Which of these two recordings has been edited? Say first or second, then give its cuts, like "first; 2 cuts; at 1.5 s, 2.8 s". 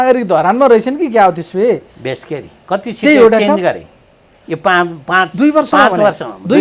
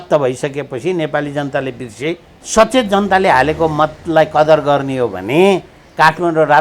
second; 1 cut; at 2.3 s